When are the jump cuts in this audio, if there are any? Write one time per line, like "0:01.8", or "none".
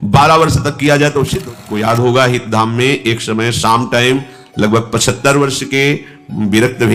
0:01.4